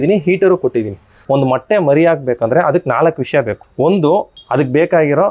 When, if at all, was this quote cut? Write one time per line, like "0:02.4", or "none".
0:01.1